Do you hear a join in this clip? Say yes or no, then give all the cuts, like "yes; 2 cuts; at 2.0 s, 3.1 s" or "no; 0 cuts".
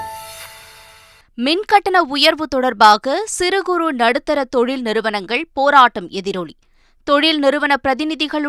yes; 1 cut; at 1.0 s